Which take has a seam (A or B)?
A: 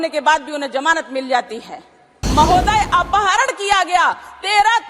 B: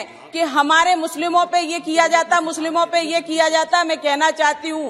A